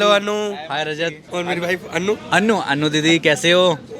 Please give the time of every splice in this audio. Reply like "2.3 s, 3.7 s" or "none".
1.2 s